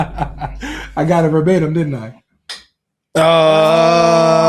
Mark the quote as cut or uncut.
uncut